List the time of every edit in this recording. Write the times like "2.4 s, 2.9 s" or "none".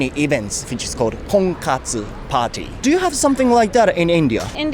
2.7 s

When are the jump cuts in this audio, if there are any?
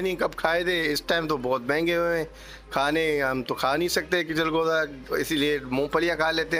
none

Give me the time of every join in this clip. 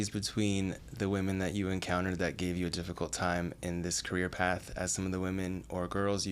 none

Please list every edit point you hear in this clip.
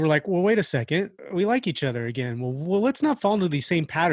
1.2 s

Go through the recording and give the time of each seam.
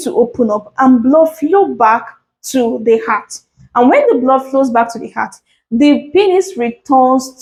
none

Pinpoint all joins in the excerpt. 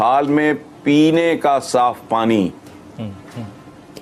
none

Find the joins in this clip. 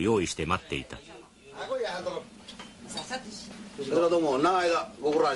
none

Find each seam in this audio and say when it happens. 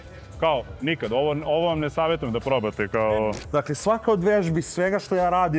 3.1 s

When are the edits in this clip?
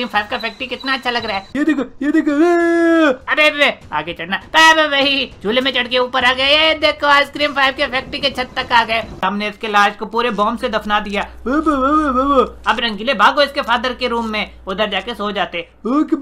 1.5 s, 9.2 s

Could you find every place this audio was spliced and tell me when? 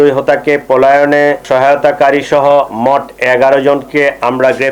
1.4 s

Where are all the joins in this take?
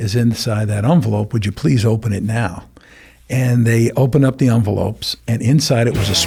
none

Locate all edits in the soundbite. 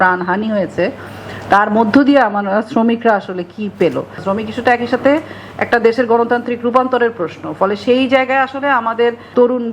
4.2 s

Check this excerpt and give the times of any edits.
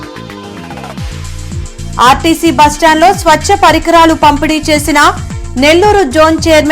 none

